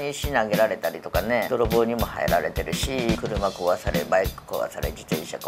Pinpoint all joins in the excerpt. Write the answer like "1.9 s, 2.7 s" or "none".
1.5 s, 3.1 s